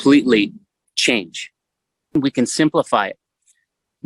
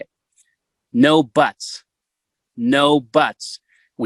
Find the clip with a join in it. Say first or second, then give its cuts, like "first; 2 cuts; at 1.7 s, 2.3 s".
first; 1 cut; at 2.1 s